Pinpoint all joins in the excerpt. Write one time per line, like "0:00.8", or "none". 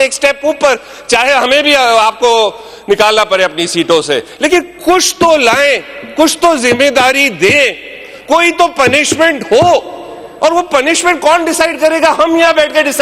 none